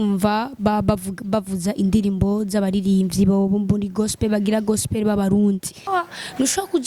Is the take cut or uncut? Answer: cut